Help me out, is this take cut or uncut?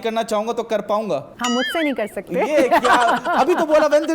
uncut